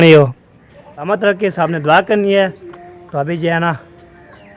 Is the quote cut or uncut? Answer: cut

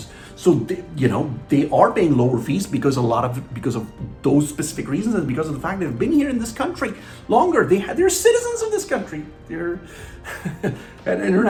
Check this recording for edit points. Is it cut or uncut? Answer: uncut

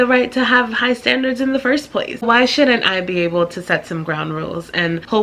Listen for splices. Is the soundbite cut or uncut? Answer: cut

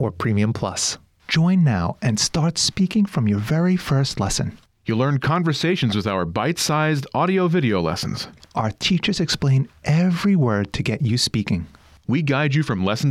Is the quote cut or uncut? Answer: cut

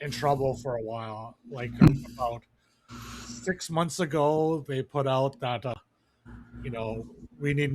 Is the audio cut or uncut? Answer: cut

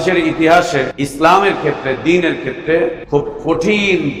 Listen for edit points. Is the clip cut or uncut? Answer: cut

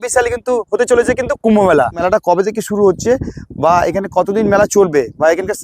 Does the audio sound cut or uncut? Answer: cut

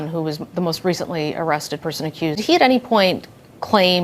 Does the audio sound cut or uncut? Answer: cut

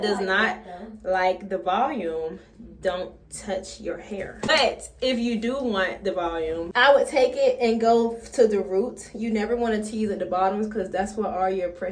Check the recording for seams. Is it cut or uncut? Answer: cut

